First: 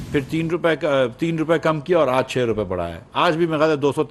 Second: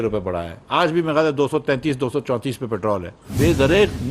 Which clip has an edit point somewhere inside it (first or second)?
second